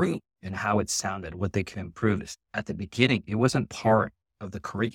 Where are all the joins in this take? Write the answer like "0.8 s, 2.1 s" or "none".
2.4 s

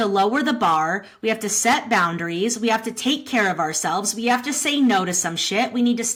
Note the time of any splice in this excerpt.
none

